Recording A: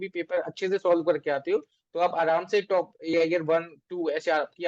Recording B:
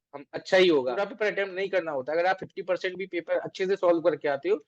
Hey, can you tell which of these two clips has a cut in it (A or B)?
B